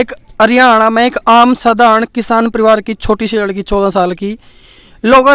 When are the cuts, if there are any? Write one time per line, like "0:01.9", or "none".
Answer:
none